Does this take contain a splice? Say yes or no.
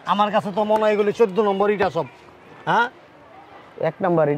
no